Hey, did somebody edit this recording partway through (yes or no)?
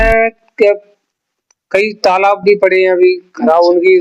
no